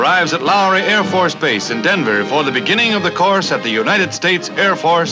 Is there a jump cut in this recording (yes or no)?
no